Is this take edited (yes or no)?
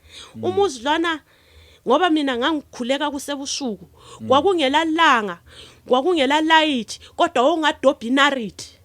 no